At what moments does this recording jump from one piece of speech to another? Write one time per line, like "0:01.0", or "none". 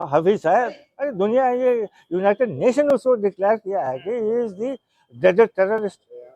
none

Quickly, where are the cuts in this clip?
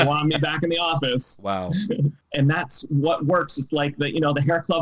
0:02.2

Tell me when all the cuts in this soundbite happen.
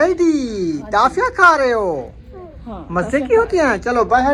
none

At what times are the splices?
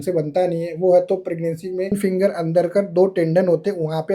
0:01.9

